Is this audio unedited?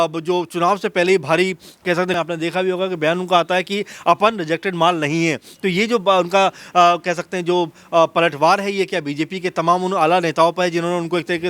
no; 1 cut; at 2.2 s

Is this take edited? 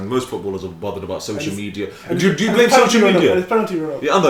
no; 0 cuts

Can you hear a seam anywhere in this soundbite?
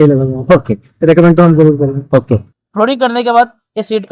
yes; 1 cut; at 2.6 s

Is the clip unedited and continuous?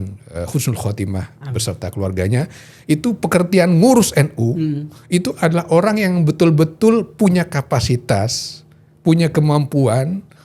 yes; 0 cuts

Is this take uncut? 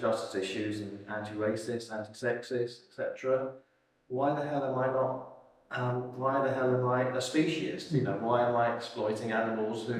yes; 0 cuts

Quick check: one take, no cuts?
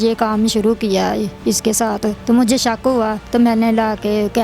no; 2 cuts; at 2.2 s, 3.2 s

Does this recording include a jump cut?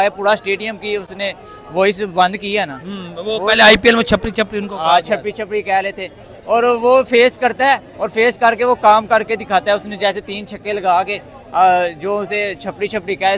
no; 0 cuts

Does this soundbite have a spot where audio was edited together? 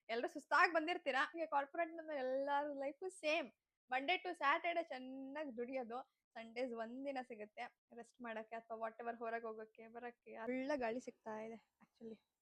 yes; 2 cuts; at 1.3 s, 10.5 s

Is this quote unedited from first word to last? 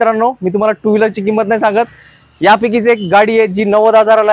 yes; 0 cuts

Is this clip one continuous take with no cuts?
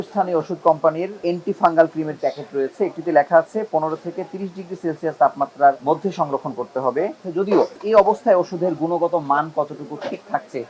no; 4 cuts; at 1.3 s, 2.1 s, 5.8 s, 7.5 s

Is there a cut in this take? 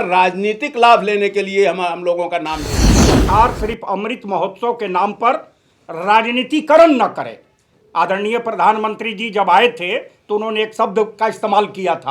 yes; 1 cut; at 3.1 s

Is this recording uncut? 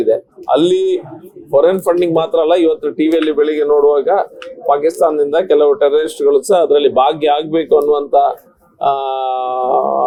yes; 0 cuts

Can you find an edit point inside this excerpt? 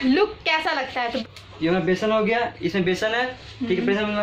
yes; 1 cut; at 1.2 s

